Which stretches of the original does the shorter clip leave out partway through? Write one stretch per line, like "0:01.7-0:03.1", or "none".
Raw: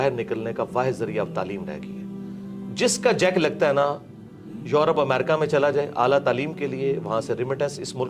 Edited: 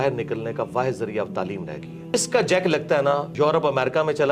0:02.1-0:02.8
0:04.0-0:04.6